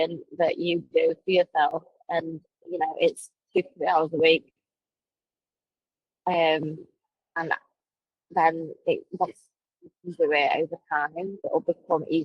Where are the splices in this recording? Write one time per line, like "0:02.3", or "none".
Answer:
0:11.3